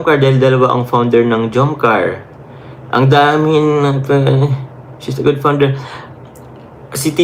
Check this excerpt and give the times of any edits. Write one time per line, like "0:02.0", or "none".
none